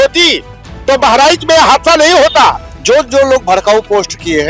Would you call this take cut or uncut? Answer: cut